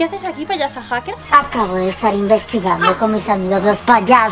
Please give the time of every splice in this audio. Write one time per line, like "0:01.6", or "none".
0:01.2